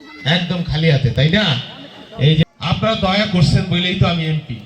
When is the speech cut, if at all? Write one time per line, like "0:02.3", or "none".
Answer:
0:02.4

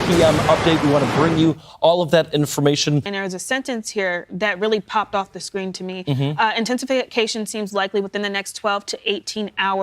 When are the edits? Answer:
0:03.1

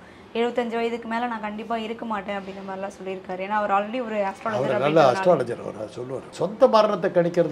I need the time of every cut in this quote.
0:06.3

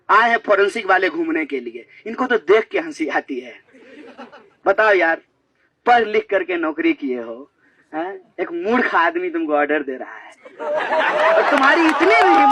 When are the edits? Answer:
none

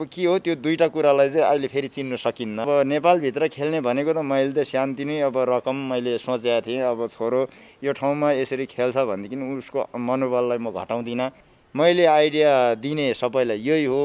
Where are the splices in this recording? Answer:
0:02.6
0:11.5

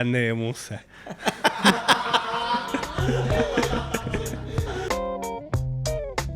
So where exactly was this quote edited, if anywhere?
0:04.9

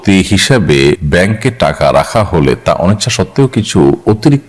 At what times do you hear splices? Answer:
0:01.0

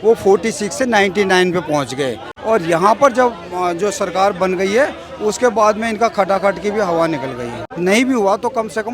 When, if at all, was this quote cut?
0:02.3
0:07.7

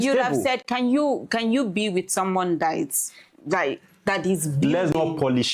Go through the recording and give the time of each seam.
none

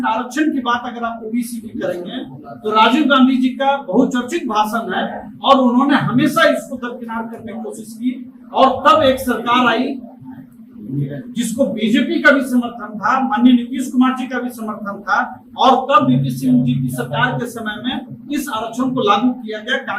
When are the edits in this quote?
none

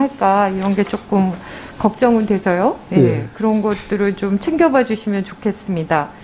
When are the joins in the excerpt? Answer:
none

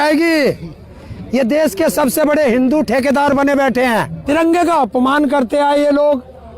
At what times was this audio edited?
0:04.1

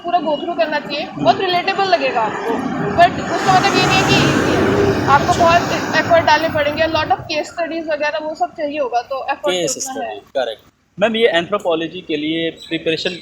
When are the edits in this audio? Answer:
none

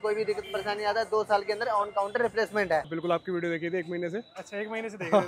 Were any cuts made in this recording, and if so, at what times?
0:02.9

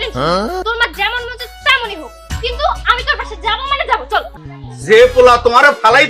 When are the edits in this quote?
0:04.3

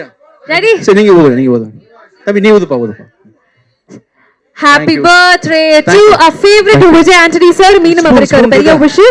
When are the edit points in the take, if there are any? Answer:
none

